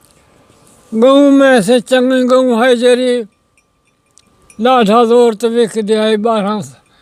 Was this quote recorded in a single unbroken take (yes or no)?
yes